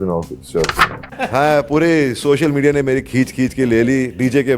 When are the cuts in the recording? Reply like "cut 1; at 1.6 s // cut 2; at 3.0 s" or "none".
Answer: cut 1; at 1.0 s